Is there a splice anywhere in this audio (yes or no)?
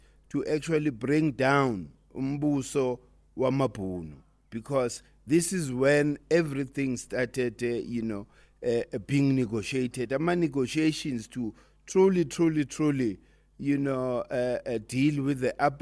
no